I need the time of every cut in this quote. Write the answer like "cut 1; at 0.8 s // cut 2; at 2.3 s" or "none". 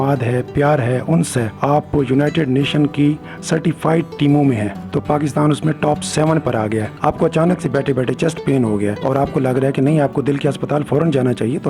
cut 1; at 1.5 s // cut 2; at 4.7 s // cut 3; at 6.9 s